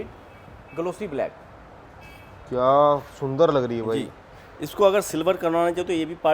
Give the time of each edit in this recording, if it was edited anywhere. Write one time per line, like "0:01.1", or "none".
none